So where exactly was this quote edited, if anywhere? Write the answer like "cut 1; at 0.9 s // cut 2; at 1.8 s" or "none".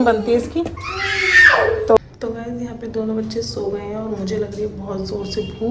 cut 1; at 2.0 s